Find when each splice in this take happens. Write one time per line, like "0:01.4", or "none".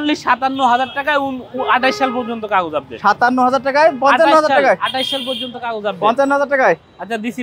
none